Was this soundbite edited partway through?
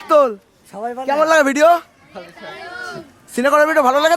no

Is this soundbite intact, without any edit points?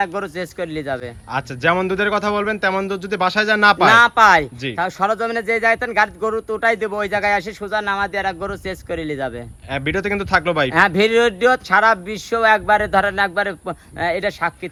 yes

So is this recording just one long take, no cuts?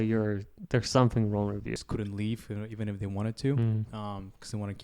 no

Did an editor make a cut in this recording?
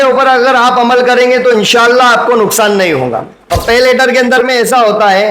yes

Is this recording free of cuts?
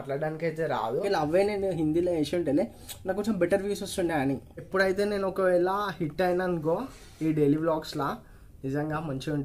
no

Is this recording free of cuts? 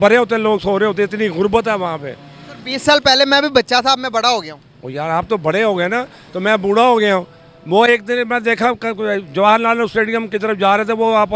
yes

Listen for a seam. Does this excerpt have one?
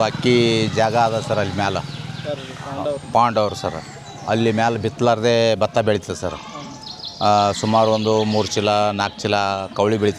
no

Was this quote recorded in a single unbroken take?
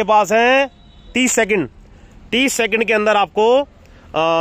yes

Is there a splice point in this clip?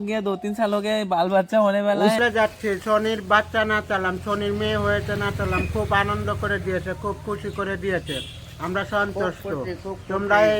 yes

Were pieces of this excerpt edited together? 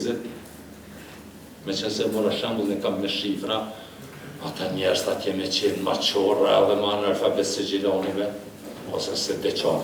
no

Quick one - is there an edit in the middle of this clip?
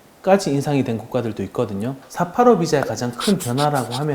yes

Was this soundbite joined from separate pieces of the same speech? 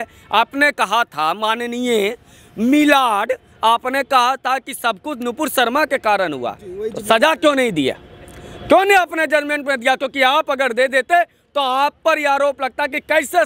no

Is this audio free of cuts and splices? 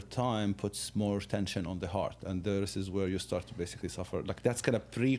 yes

